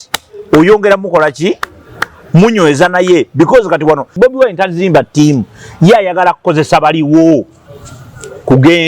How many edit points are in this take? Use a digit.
1